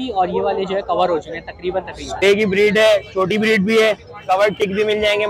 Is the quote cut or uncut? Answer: cut